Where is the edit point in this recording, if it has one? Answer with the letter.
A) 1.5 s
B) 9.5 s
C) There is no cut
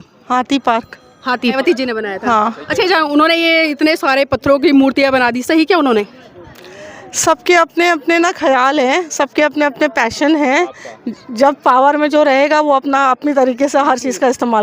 A